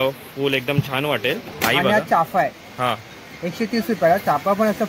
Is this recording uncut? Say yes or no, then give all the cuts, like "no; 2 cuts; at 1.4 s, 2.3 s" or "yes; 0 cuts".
no; 1 cut; at 1.5 s